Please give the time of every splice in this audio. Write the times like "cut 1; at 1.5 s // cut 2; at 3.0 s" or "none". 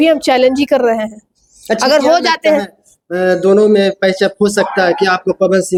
none